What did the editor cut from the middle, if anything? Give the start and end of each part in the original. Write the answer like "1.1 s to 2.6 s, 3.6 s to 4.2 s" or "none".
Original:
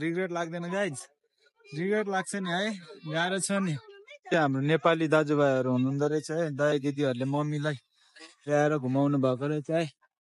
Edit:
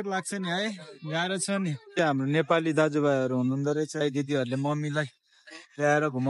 3.8 s to 4.2 s, 6.4 s to 6.7 s